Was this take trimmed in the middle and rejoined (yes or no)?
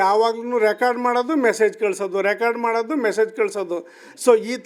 no